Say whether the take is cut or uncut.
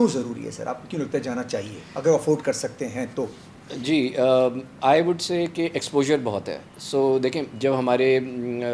uncut